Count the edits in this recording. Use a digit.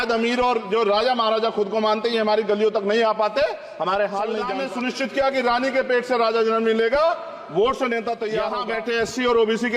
2